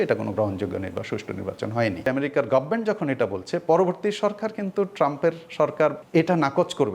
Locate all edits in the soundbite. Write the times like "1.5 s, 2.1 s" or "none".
2.1 s, 6.0 s